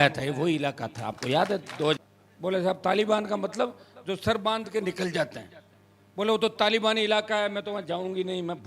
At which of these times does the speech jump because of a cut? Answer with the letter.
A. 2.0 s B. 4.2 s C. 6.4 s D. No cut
A